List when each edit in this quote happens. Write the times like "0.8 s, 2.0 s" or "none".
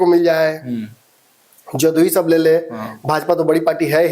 none